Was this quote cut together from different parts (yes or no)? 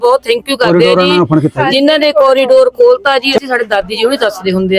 yes